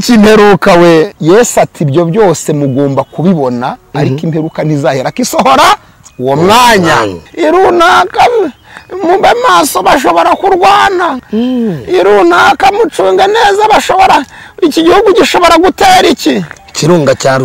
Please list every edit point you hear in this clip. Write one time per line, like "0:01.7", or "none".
0:01.2
0:07.2
0:11.2